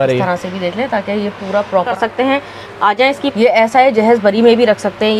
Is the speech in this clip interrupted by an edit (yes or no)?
yes